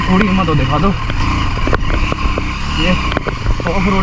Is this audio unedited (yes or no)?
yes